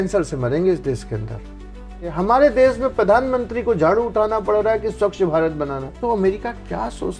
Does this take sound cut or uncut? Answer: cut